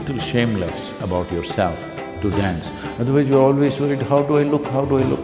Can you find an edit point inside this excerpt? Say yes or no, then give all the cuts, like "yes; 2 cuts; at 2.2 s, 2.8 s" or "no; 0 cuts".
no; 0 cuts